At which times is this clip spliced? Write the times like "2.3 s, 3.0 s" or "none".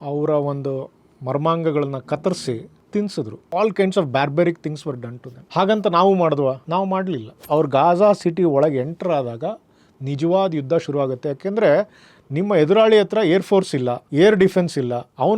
3.4 s, 7.3 s